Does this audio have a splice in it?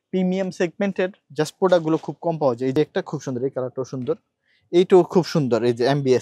yes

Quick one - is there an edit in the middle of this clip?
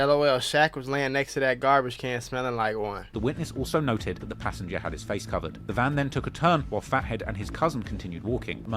yes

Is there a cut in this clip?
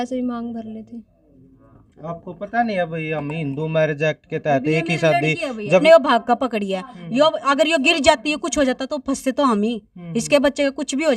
yes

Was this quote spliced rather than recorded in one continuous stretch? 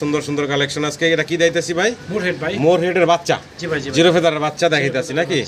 no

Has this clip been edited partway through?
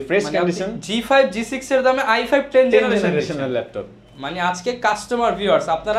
no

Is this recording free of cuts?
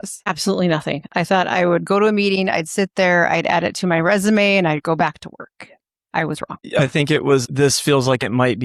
no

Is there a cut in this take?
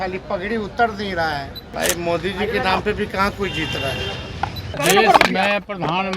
yes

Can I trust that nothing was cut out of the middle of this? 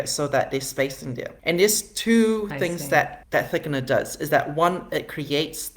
no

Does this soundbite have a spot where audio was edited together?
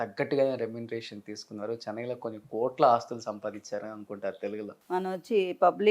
yes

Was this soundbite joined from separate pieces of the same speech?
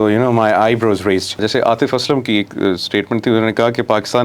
yes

